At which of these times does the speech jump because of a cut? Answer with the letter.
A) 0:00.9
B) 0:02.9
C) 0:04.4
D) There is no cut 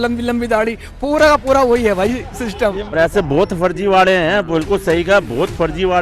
B